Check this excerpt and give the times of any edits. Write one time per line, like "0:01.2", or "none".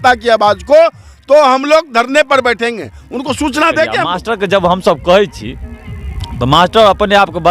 0:04.2

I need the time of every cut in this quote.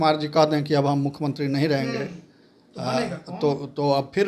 none

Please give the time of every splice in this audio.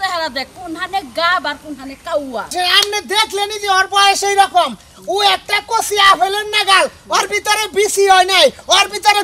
0:02.5

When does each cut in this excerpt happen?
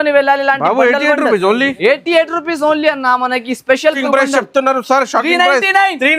0:03.9

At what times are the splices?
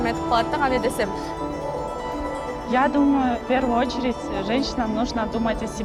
none

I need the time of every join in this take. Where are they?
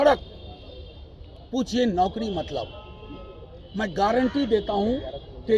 none

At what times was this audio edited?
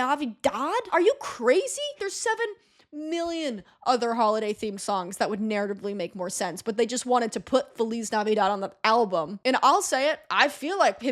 0:01.9
0:09.3

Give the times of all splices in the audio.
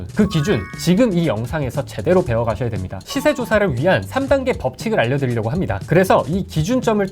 0:03.0

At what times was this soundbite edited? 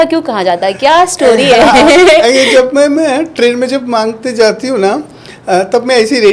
none

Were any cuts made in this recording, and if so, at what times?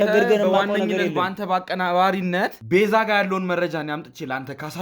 0:02.6

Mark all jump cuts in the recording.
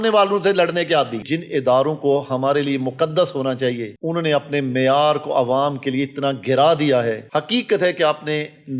0:01.2
0:07.3

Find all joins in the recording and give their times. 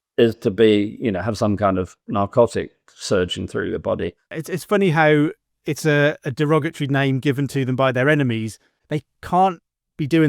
0:04.3
0:09.0

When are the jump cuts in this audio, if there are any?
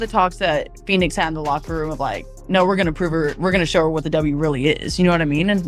none

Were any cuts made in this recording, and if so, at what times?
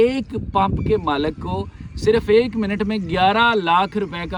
none

